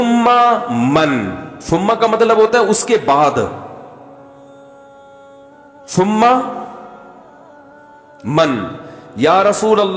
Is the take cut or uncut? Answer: uncut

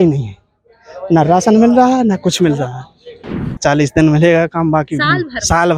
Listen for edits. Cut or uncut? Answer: cut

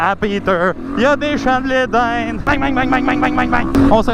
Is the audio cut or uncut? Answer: uncut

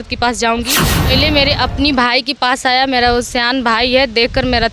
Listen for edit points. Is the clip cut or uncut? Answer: cut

